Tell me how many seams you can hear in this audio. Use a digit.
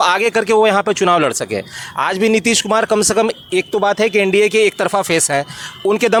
0